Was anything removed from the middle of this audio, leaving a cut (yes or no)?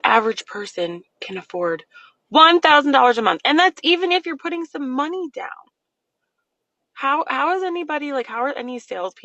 no